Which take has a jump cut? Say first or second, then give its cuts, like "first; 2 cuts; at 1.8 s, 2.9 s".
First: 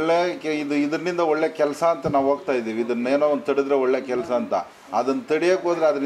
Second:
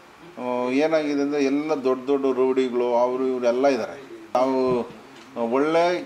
second; 1 cut; at 4.3 s